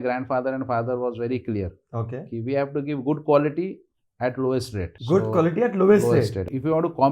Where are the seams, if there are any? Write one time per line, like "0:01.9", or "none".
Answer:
none